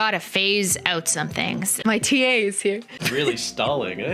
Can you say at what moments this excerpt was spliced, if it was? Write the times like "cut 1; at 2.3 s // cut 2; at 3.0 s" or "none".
cut 1; at 1.7 s // cut 2; at 3.0 s